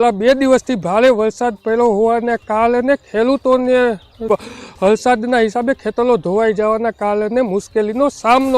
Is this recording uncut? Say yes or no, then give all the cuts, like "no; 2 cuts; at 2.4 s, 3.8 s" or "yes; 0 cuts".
yes; 0 cuts